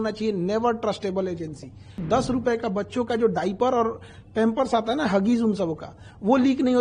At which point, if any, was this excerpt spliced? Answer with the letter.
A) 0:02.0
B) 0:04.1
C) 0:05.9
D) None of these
A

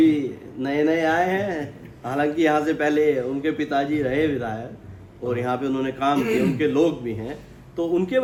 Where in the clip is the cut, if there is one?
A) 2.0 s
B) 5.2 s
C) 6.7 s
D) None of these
D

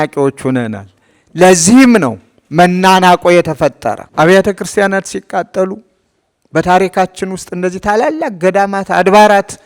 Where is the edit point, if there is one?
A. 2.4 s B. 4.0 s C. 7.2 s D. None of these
B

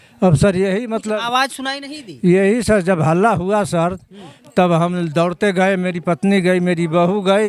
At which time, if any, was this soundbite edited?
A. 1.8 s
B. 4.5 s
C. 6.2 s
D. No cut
D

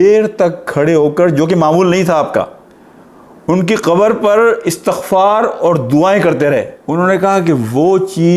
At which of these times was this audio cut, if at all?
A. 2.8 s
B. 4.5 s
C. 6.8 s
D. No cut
C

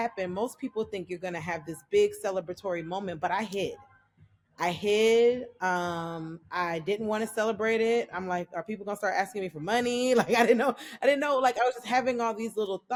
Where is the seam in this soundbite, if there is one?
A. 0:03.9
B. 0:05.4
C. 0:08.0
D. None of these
D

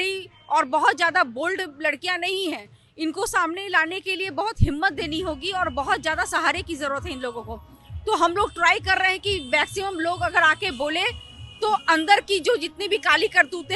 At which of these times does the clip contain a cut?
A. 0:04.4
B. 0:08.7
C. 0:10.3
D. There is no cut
D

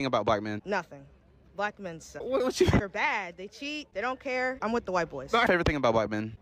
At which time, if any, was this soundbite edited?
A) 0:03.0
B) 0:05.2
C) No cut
C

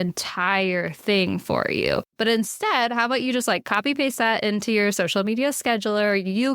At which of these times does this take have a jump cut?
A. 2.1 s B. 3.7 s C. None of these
A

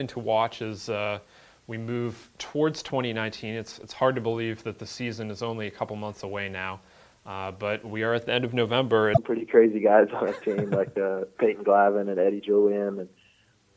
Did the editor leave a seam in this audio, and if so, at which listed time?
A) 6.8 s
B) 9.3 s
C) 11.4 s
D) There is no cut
B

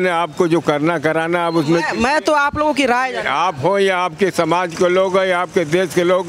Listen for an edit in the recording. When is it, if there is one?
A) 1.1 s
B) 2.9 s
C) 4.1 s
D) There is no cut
D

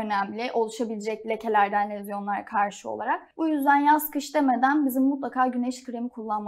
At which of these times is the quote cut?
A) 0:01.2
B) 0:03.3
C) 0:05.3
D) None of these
B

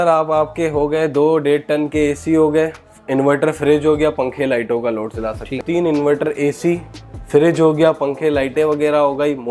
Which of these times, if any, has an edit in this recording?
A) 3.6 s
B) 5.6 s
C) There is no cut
B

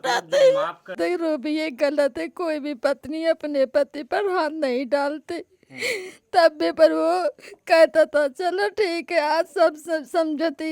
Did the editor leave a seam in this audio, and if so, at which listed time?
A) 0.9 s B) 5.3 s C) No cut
A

